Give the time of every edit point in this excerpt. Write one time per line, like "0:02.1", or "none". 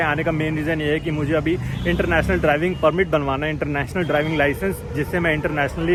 none